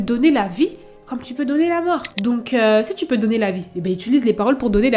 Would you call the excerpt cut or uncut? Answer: uncut